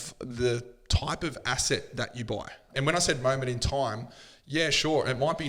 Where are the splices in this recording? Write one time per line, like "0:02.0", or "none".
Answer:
0:02.7

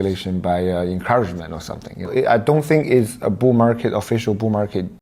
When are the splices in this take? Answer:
0:02.1

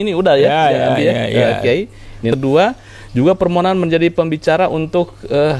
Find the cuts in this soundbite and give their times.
0:02.3

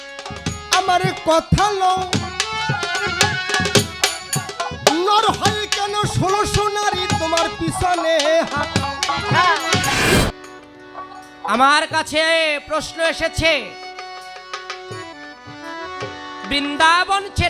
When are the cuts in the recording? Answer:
0:10.0

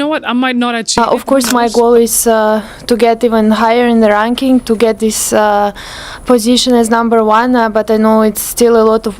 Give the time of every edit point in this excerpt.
0:01.0

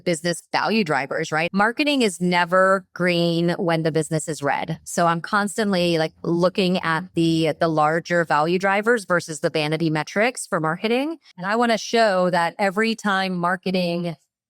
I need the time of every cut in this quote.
0:01.5
0:11.3

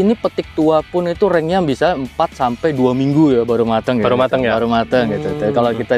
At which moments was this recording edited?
none

